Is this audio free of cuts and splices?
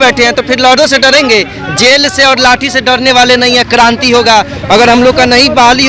yes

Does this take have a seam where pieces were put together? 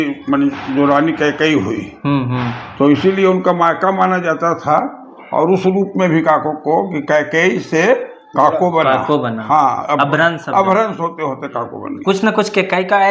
yes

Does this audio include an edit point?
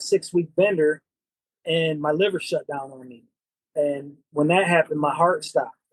no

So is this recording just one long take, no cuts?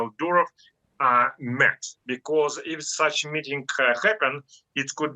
no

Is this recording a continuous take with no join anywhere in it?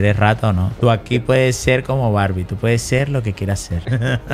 yes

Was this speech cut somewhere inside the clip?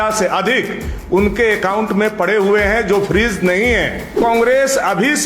yes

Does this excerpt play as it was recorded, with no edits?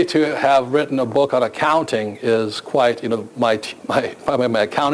yes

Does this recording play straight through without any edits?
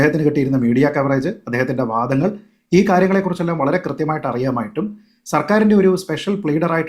yes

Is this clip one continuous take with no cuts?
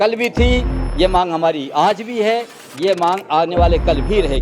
yes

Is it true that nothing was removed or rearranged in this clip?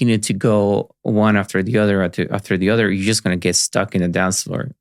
yes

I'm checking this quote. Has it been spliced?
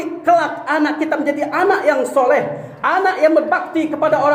no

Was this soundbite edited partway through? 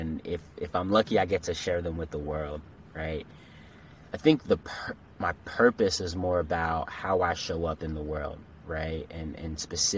no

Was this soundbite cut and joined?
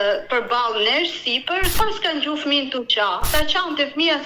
yes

